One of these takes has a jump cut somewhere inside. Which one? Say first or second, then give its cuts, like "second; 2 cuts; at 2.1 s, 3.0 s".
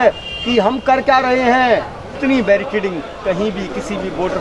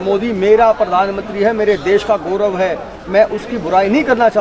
first; 1 cut; at 2.0 s